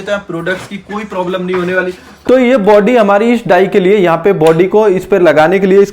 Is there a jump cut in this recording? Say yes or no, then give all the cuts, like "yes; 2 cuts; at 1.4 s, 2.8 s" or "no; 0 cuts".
yes; 1 cut; at 2.1 s